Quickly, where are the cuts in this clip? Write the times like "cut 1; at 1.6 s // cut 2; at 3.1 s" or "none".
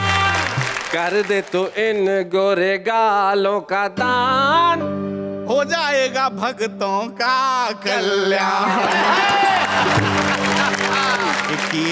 none